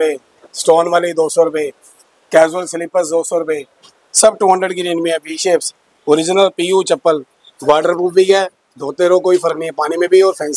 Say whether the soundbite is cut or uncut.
uncut